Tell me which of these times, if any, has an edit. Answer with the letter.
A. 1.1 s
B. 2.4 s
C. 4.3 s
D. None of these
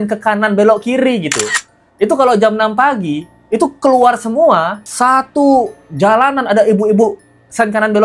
D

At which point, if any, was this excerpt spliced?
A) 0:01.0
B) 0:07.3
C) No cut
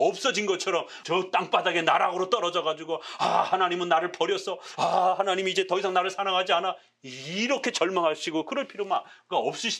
A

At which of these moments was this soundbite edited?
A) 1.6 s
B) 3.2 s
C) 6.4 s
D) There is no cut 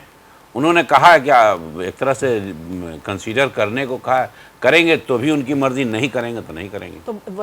D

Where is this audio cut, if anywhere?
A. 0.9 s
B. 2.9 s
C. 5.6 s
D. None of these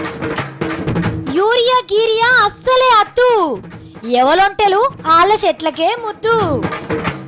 A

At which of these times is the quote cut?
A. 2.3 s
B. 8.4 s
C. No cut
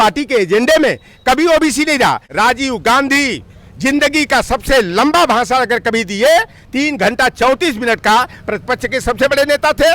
A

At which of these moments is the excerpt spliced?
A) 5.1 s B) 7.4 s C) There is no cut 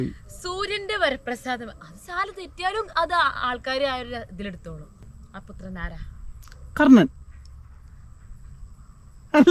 A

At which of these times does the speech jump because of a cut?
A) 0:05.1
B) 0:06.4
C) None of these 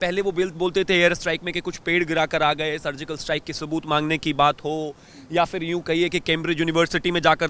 C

